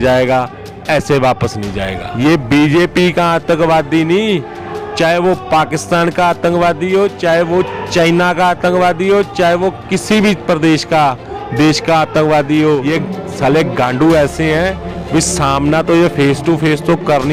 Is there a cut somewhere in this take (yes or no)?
yes